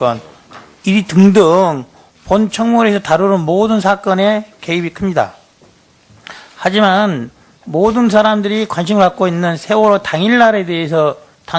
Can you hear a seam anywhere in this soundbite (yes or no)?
yes